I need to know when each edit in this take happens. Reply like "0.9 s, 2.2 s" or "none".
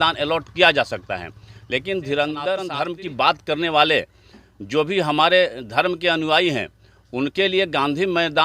2.7 s